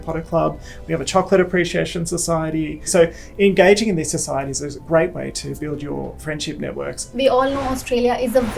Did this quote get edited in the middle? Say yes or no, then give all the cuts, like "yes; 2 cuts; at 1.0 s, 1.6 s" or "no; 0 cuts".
yes; 4 cuts; at 2.9 s, 4.7 s, 5.6 s, 7.0 s